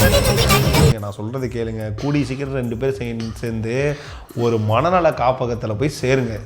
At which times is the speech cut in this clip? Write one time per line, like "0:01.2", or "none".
0:01.0